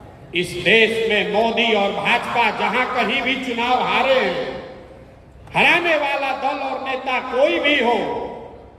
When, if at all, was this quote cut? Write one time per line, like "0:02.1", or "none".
none